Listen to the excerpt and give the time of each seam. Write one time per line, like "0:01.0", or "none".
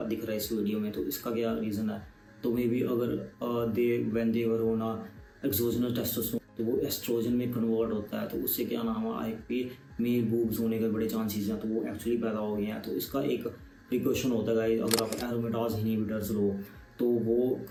none